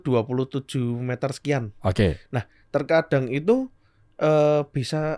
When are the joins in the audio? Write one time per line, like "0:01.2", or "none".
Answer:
none